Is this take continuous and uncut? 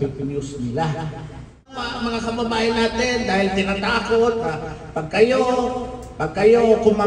no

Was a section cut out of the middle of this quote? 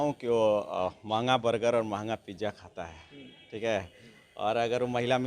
no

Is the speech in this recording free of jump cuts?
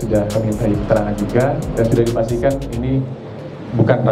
yes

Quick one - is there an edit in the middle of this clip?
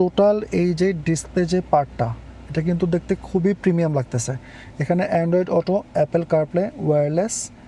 no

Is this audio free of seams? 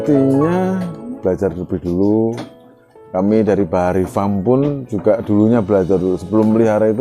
no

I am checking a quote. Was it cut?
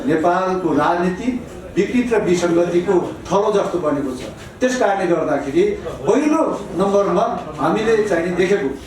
no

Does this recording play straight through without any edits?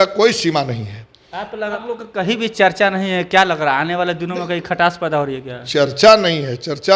no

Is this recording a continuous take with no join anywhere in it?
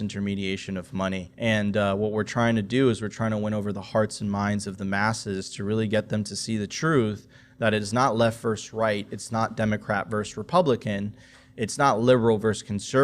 no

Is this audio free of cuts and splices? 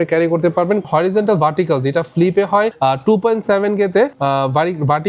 no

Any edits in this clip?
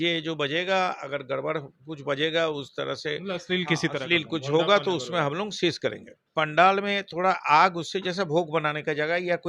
yes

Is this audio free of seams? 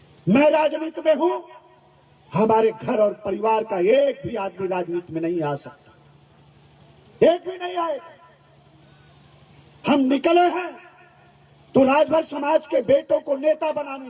yes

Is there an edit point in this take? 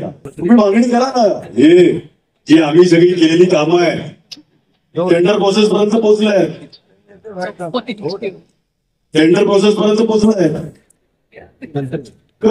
no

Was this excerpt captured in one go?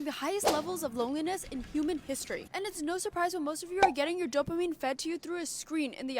yes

